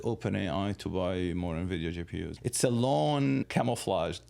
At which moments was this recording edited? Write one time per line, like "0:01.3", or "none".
0:02.3
0:03.5